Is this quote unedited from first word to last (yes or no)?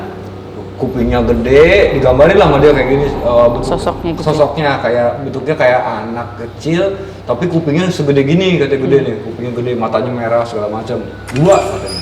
yes